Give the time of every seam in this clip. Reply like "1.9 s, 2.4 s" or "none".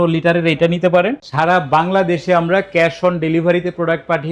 1.2 s

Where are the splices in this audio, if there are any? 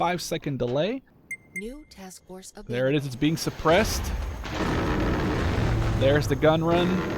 1.2 s

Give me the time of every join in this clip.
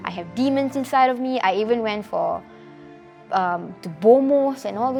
none

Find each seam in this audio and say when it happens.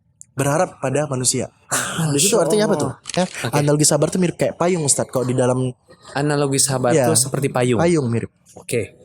3.2 s

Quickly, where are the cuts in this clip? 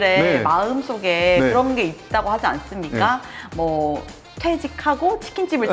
none

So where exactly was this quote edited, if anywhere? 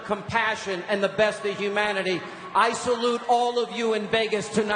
none

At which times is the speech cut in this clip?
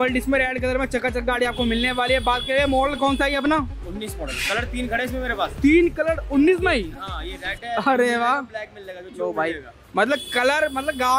none

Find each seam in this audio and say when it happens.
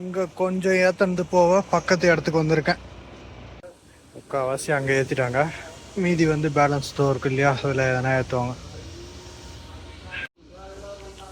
none

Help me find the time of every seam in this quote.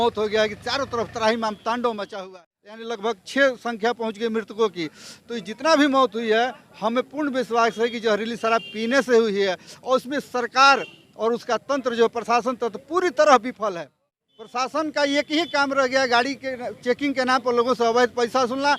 2.4 s

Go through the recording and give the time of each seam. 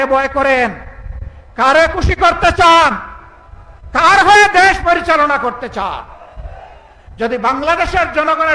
none

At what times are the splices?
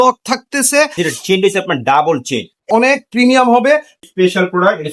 0.9 s, 2.7 s, 4.0 s

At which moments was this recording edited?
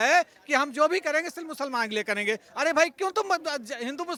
none

